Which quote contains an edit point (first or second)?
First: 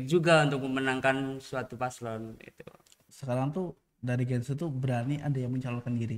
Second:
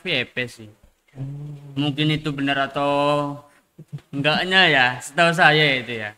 first